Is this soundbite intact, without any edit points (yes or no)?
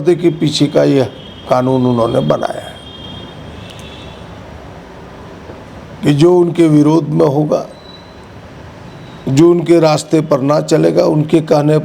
yes